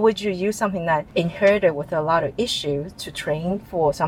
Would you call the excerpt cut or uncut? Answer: cut